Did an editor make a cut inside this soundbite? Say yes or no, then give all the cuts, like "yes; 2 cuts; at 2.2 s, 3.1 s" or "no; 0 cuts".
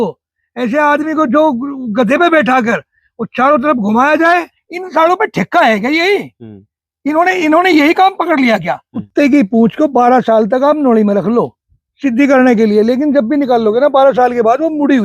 yes; 2 cuts; at 4.6 s, 9.0 s